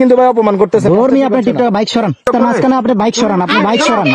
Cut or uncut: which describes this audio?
cut